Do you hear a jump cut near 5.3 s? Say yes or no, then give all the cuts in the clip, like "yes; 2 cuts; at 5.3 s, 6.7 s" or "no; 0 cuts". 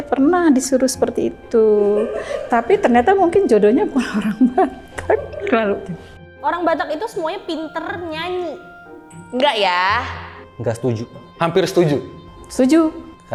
no; 0 cuts